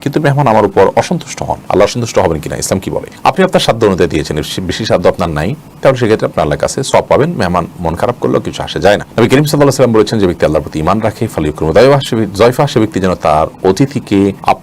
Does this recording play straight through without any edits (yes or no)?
yes